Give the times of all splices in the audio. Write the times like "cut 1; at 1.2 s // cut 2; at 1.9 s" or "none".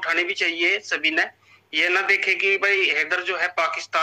none